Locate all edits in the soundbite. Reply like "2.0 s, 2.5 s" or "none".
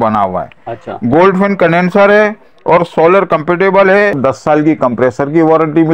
4.2 s